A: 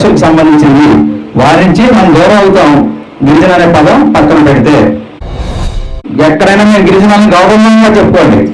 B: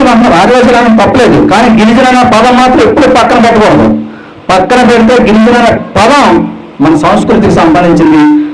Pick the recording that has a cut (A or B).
A